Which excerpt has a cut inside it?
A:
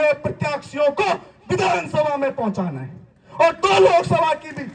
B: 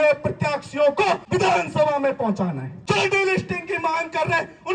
B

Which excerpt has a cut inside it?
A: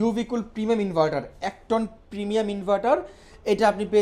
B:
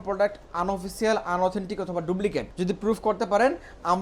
B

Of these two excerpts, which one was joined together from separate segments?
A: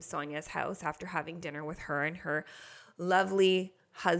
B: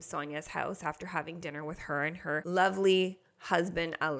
B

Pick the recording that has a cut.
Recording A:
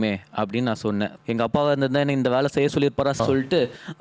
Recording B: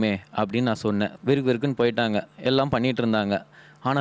A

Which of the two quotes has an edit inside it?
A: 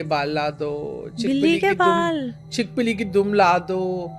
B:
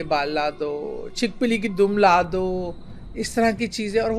B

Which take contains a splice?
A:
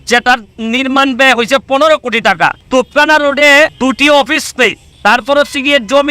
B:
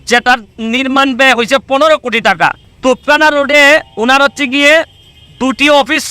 A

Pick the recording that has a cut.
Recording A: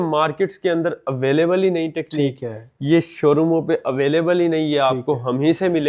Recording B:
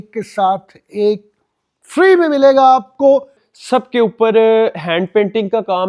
B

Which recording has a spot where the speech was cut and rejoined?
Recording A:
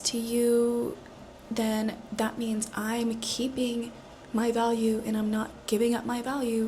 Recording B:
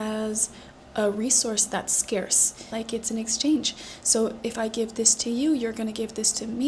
B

